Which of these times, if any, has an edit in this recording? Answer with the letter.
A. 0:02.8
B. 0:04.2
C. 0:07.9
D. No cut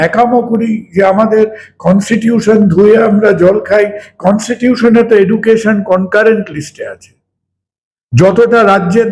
D